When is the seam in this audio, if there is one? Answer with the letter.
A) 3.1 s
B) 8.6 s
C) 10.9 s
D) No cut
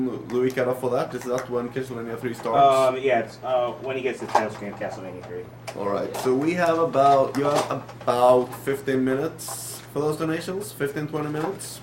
B